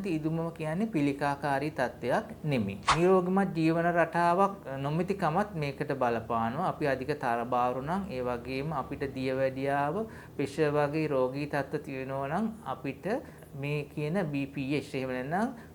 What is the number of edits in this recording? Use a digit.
2